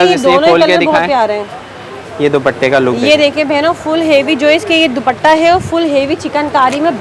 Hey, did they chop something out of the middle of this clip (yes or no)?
no